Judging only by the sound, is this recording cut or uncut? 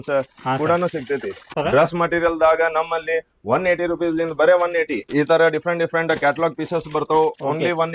cut